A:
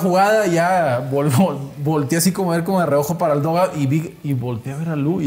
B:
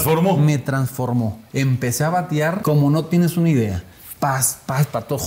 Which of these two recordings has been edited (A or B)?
B